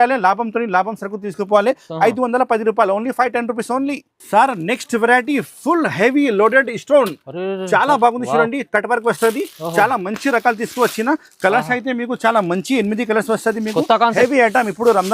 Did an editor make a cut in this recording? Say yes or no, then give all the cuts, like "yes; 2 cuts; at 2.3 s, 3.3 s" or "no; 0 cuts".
no; 0 cuts